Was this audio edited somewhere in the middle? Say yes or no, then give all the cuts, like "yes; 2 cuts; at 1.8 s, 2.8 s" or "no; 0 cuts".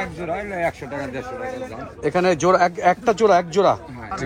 no; 0 cuts